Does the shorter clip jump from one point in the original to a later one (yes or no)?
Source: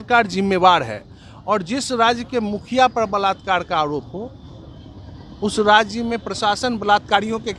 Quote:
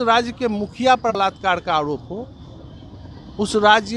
yes